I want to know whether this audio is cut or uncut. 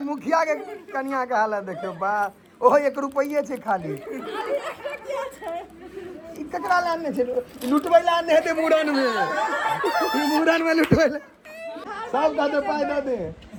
uncut